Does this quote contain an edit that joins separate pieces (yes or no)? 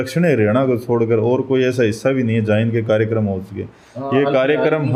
no